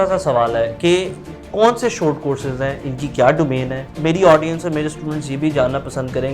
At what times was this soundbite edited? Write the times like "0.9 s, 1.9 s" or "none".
1.5 s, 3.8 s